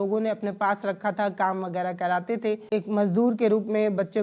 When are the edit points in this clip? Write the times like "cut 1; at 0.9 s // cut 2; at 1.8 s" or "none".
cut 1; at 2.7 s